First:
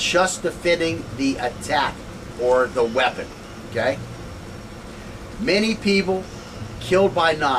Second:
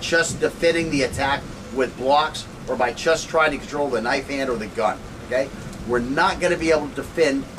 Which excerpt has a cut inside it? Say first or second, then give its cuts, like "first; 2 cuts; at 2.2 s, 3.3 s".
second; 1 cut; at 6.5 s